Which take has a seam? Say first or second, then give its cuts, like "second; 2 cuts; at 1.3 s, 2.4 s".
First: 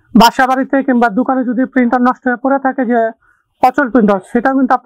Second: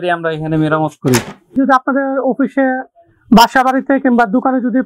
second; 1 cut; at 1.5 s